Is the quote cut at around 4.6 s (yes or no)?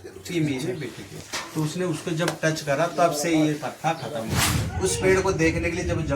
yes